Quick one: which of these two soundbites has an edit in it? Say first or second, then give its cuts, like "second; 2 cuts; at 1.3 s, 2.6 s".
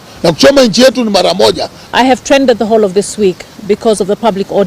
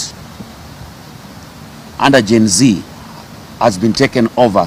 first; 1 cut; at 2.0 s